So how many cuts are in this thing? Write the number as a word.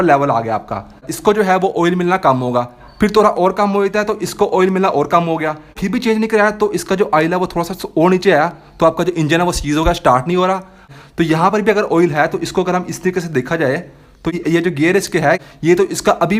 four